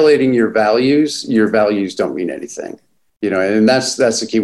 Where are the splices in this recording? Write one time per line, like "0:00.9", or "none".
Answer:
none